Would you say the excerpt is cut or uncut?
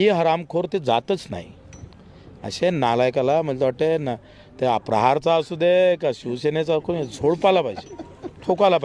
uncut